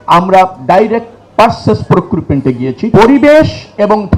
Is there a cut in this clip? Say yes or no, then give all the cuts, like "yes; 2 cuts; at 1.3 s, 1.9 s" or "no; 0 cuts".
yes; 1 cut; at 2.8 s